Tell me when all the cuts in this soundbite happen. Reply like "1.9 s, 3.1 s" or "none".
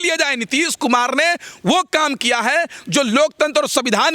none